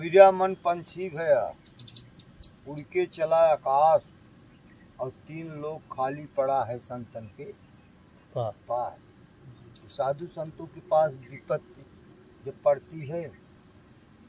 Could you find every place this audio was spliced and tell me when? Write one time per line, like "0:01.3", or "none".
none